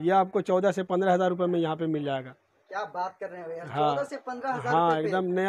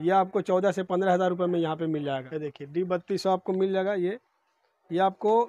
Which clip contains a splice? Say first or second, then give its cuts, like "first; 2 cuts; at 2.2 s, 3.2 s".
second; 1 cut; at 2.3 s